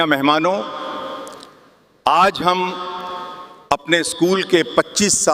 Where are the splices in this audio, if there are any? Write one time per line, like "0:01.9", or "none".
none